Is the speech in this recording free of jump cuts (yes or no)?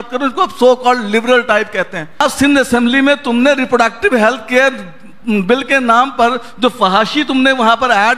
no